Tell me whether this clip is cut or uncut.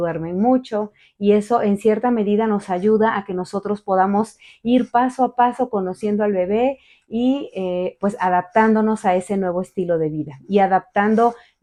uncut